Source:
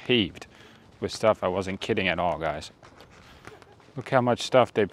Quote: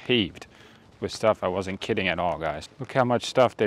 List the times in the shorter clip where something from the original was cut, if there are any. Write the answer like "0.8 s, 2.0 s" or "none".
2.7 s